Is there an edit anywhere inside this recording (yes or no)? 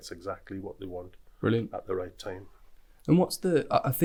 no